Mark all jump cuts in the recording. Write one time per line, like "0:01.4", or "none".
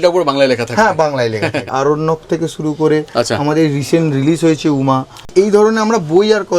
0:01.7
0:05.3